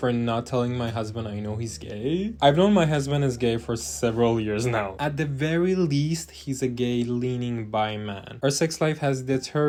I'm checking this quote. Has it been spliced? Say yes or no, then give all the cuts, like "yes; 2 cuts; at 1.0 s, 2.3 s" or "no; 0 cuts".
no; 0 cuts